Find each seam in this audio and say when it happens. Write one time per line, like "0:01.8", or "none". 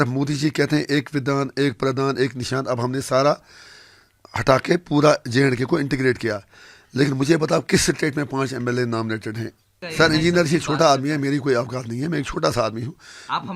0:09.8